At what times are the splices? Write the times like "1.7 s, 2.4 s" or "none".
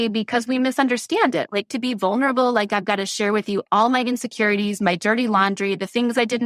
1.5 s